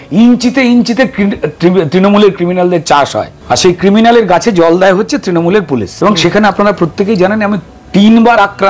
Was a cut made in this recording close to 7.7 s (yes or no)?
no